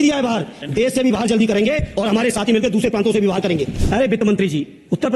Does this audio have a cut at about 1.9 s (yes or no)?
no